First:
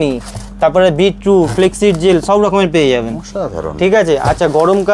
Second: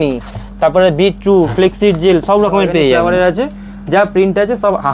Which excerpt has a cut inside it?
second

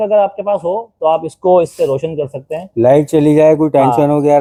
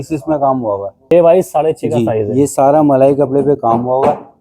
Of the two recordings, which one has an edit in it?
second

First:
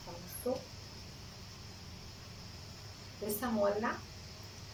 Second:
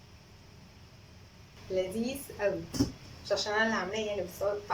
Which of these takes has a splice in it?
second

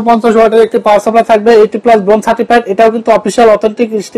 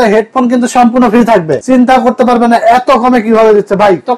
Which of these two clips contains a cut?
second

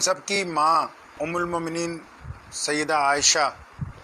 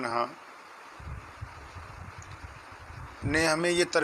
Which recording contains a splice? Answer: first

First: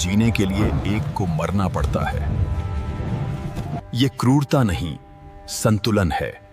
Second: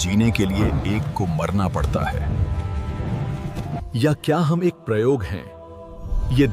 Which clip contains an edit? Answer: second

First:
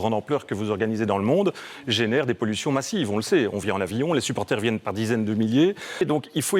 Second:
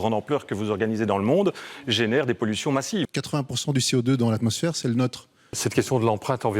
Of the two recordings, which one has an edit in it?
second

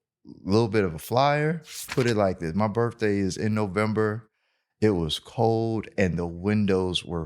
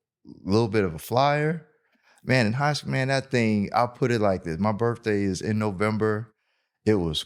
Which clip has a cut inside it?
first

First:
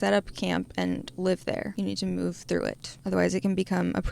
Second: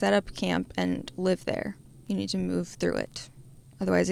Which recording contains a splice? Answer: first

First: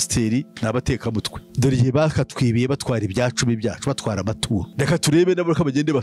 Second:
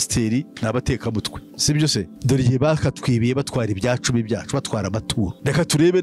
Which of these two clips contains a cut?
first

